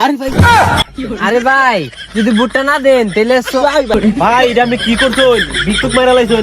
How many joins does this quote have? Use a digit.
1